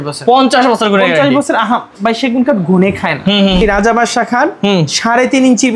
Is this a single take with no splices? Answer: no; 1 cut; at 3.6 s

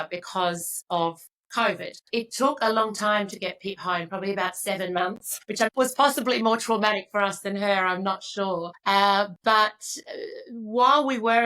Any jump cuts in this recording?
yes; 3 cuts; at 2.0 s, 5.5 s, 8.7 s

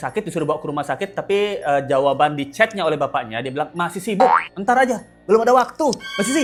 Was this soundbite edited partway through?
no; 0 cuts

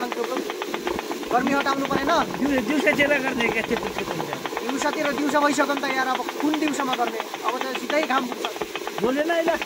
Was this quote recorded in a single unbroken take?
yes; 0 cuts

